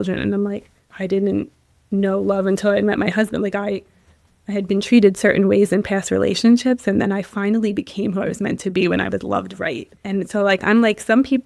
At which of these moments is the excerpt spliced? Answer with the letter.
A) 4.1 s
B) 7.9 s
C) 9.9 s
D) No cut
C